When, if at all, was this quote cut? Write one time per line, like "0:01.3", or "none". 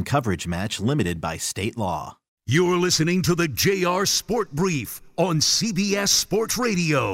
0:02.3